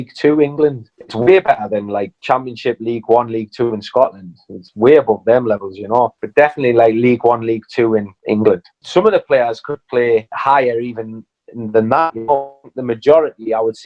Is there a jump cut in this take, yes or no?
no